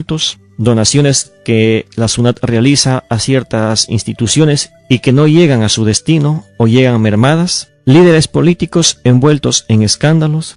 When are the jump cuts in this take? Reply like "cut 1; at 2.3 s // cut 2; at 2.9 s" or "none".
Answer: cut 1; at 2.8 s

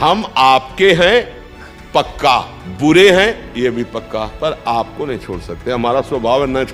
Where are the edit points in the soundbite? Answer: cut 1; at 2.6 s // cut 2; at 4.3 s

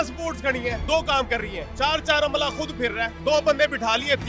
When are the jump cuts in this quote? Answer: cut 1; at 0.8 s // cut 2; at 1.6 s // cut 3; at 3.2 s

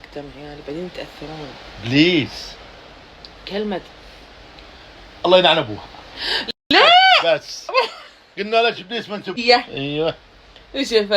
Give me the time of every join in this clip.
cut 1; at 9.4 s

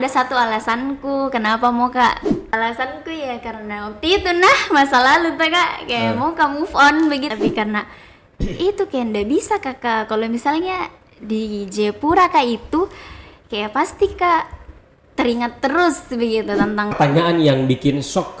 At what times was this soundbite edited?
cut 1; at 2.5 s // cut 2; at 7.4 s // cut 3; at 17.0 s

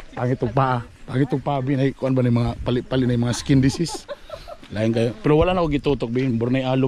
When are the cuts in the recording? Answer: none

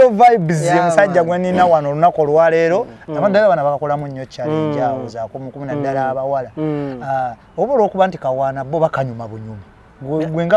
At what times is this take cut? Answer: cut 1; at 3.0 s

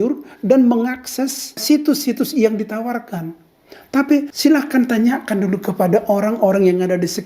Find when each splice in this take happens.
cut 1; at 1.5 s // cut 2; at 4.3 s

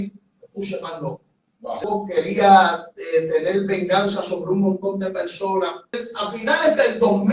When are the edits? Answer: cut 1; at 1.8 s // cut 2; at 6.0 s

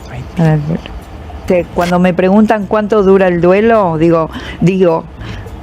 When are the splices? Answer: cut 1; at 1.4 s

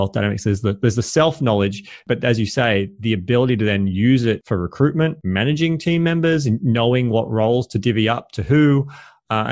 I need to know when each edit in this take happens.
cut 1; at 4.4 s // cut 2; at 5.2 s

